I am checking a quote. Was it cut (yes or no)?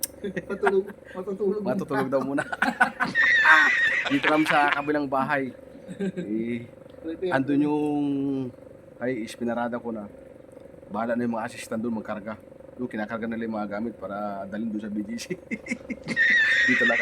no